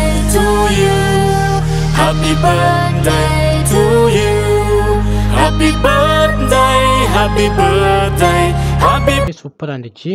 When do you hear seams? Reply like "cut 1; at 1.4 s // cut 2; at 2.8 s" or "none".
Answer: cut 1; at 9.3 s